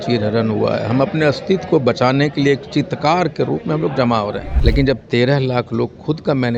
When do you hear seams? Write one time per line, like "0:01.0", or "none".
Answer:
0:04.5